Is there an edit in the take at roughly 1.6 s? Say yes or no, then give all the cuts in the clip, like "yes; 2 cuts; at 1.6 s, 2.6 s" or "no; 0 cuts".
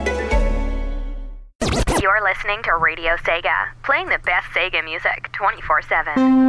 yes; 1 cut; at 1.6 s